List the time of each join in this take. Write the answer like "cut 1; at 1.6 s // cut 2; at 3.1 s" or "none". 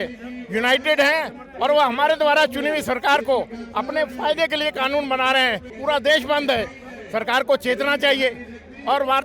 cut 1; at 5.7 s